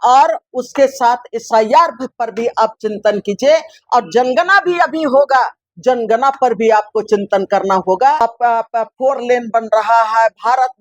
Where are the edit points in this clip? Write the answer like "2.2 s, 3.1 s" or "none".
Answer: 8.2 s